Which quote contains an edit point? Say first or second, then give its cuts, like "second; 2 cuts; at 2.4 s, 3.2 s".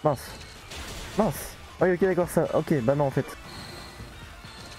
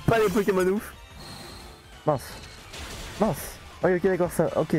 second; 1 cut; at 0.9 s